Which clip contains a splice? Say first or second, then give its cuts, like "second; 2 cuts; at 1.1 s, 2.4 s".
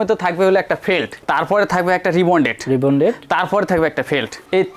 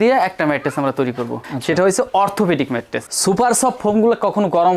second; 1 cut; at 3.1 s